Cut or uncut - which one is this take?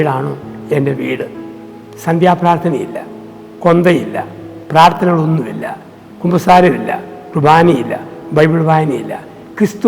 uncut